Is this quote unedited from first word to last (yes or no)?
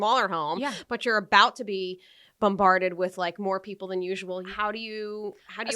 no